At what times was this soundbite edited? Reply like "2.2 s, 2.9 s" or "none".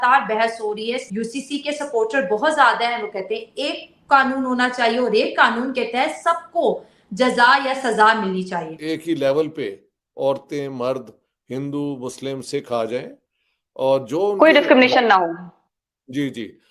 1.0 s, 8.8 s

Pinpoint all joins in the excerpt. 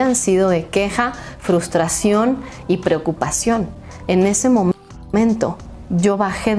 none

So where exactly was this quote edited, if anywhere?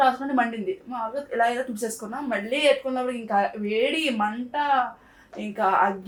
none

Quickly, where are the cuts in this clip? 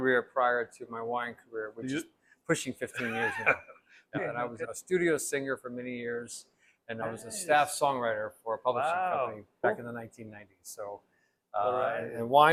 none

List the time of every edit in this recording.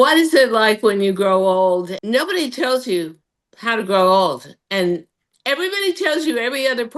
2.0 s

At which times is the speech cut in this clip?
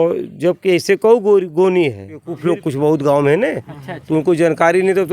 2.3 s

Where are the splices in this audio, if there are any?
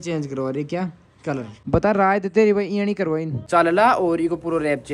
1.5 s, 3.3 s

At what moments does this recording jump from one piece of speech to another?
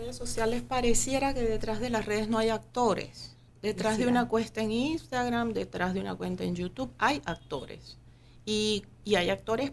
none

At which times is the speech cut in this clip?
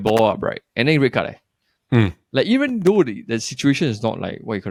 none

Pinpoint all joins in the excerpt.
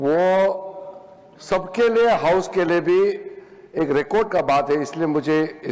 none

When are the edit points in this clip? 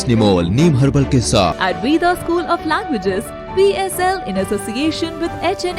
1.6 s

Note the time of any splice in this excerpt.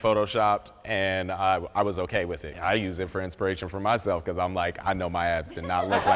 2.5 s

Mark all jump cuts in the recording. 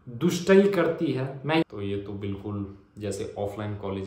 1.6 s

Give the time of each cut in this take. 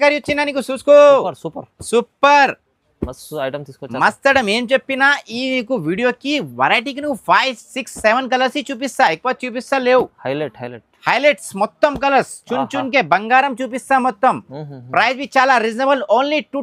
none

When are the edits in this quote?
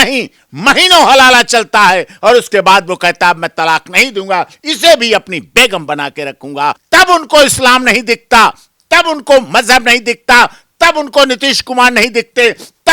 6.8 s

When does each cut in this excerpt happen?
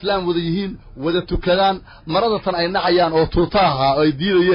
none

